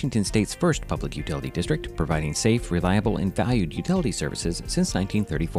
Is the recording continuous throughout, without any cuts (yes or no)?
yes